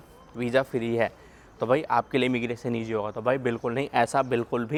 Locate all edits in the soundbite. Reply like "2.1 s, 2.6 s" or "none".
none